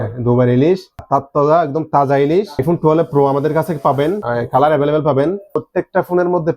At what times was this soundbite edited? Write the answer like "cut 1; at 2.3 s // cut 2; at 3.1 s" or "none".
cut 1; at 1.0 s // cut 2; at 2.6 s // cut 3; at 4.2 s // cut 4; at 5.6 s